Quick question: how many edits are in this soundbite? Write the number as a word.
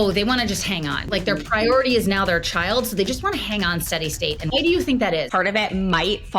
three